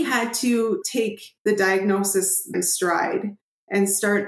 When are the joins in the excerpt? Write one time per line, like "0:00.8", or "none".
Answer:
0:00.9
0:02.5